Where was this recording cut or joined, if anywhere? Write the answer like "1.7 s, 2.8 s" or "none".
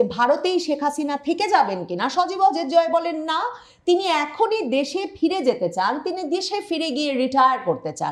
none